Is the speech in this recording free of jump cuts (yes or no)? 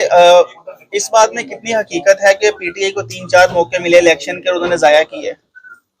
yes